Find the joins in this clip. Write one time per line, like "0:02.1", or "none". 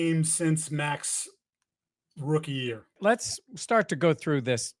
0:03.0